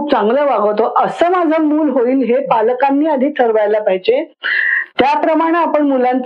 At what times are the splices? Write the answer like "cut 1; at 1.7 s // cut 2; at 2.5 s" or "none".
none